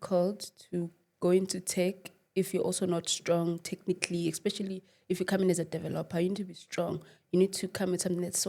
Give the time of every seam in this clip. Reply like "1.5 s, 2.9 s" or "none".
none